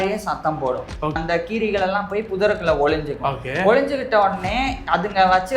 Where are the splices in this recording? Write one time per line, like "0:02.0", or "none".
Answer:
0:01.2